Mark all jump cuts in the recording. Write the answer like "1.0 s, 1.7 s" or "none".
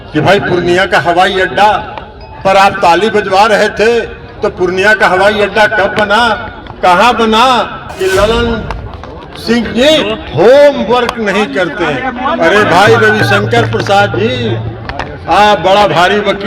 7.9 s

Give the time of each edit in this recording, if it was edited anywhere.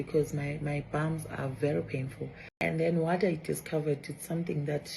2.4 s

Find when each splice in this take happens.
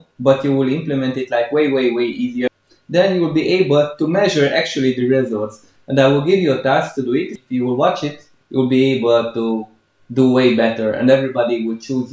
2.5 s, 7.4 s

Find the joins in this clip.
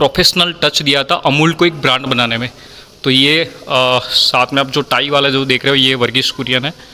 none

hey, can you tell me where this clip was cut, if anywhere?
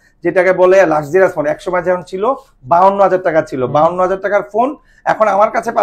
none

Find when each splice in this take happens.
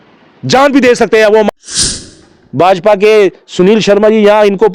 1.9 s

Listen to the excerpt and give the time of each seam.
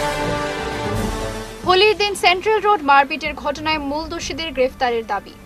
1.0 s

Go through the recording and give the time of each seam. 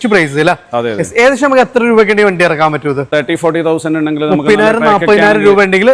3.1 s

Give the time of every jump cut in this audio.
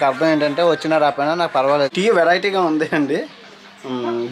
1.9 s

